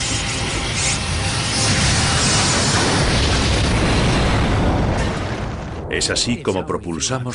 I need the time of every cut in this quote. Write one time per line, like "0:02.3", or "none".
none